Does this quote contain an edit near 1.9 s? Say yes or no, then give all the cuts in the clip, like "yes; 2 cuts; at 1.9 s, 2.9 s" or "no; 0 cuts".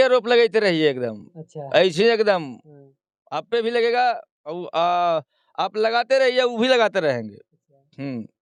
no; 0 cuts